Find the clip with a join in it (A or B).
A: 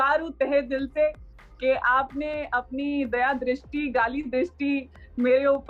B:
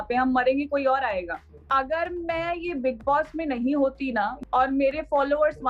B